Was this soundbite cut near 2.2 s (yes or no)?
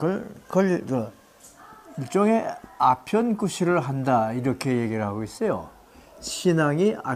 yes